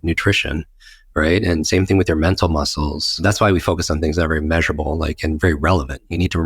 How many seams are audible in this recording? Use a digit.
1